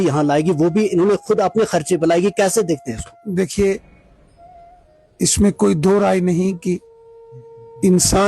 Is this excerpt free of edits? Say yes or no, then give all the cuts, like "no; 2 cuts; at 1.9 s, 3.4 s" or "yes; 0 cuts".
yes; 0 cuts